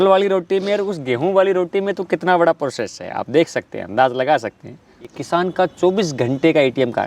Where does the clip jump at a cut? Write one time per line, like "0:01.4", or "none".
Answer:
0:05.0